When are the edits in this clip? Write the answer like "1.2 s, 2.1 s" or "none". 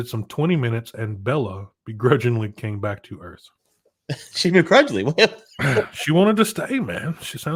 none